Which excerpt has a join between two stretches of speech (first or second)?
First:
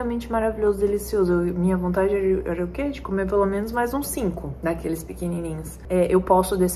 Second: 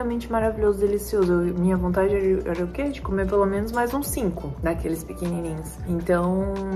first